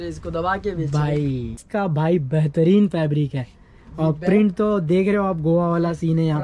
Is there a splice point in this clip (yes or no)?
yes